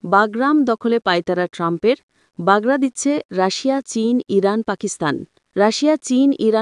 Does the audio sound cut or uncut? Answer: uncut